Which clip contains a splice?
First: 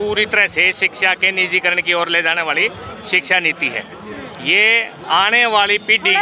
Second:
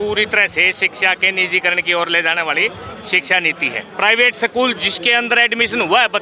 second; 1 cut; at 3.8 s

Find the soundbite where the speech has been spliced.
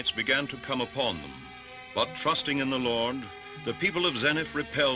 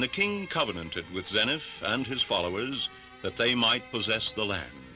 first; 1 cut; at 1.7 s

